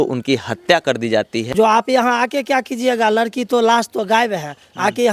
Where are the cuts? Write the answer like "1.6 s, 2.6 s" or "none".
1.5 s